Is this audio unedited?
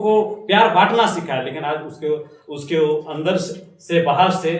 yes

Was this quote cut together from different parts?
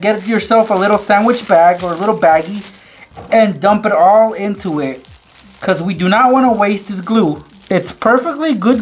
no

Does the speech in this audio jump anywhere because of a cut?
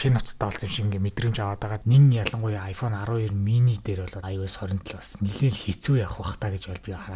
yes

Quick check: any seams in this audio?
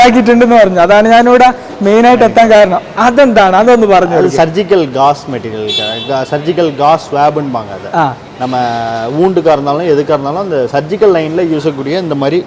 no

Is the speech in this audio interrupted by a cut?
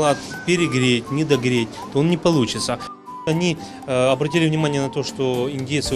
yes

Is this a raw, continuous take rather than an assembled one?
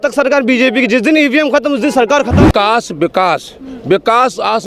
no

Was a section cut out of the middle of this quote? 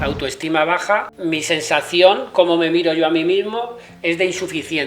yes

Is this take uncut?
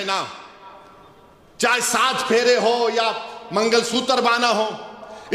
yes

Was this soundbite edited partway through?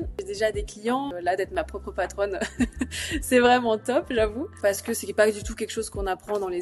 yes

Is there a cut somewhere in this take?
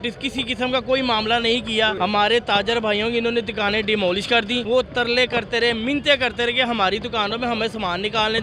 yes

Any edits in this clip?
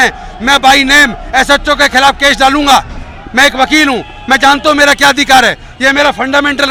no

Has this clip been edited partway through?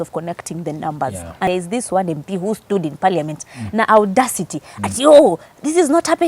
yes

